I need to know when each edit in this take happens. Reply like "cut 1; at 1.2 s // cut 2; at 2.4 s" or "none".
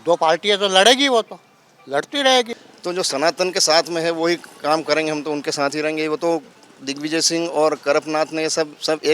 cut 1; at 2.6 s